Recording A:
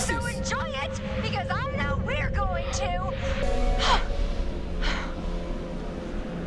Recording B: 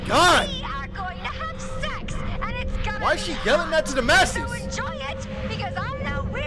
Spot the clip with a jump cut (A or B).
A